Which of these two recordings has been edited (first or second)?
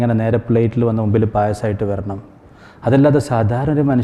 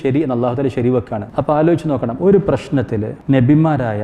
second